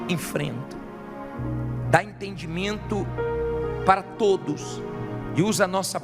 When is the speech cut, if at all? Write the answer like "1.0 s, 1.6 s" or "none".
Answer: 1.7 s